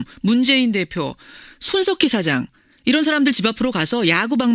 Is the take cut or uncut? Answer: uncut